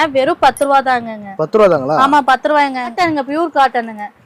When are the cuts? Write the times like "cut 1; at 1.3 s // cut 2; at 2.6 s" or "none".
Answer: cut 1; at 3.0 s